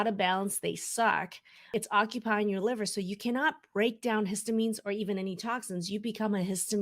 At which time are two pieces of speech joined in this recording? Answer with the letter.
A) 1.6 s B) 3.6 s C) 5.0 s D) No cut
A